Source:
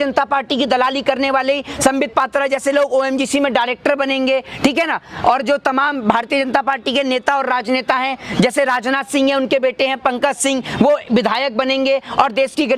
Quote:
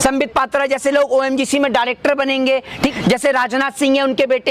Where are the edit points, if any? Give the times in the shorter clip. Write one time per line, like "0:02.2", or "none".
0:02.9